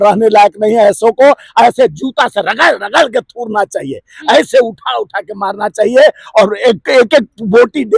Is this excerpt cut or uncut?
uncut